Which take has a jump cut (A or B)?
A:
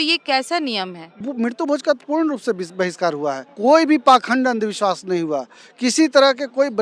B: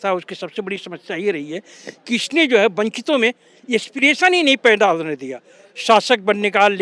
A